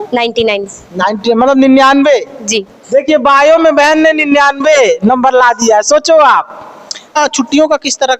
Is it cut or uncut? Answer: cut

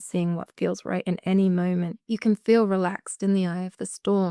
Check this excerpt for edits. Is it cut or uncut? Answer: cut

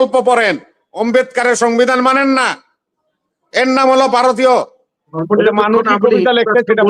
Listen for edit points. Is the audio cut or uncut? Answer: cut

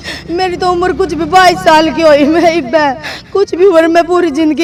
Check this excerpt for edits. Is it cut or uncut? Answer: uncut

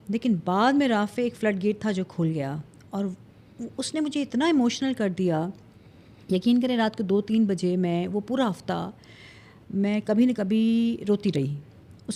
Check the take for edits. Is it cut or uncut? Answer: uncut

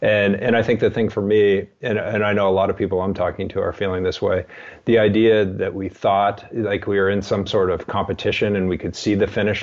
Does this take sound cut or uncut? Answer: uncut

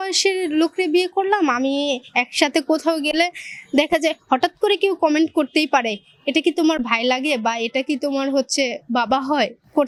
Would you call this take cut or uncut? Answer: uncut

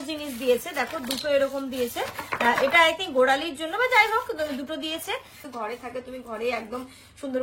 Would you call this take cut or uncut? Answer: cut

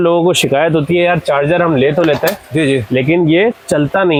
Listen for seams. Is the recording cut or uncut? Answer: uncut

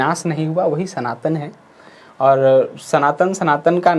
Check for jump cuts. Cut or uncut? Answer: uncut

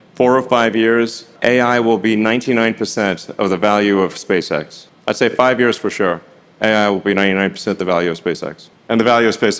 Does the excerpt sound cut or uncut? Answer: uncut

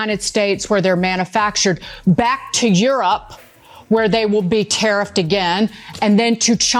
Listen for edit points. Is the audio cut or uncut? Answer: uncut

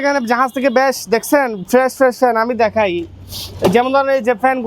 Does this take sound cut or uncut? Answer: uncut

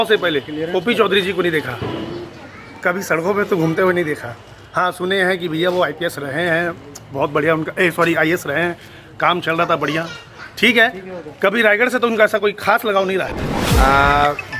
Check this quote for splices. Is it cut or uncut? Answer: uncut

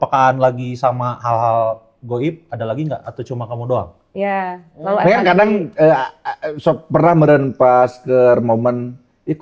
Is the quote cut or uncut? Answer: cut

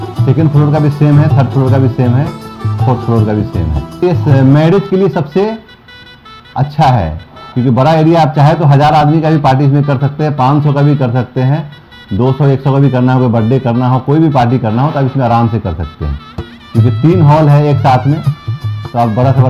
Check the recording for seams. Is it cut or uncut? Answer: uncut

